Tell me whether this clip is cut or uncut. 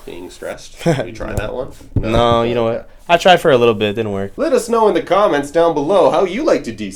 cut